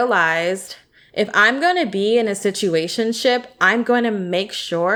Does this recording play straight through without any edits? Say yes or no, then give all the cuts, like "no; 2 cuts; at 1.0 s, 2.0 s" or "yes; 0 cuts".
yes; 0 cuts